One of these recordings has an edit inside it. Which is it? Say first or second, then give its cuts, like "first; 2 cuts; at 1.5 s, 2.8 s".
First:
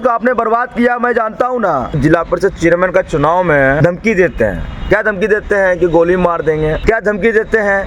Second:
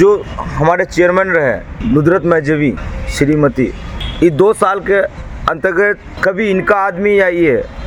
first; 3 cuts; at 1.9 s, 3.8 s, 6.8 s